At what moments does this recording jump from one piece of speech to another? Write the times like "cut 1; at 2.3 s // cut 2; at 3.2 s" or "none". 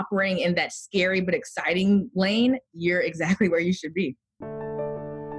cut 1; at 4.5 s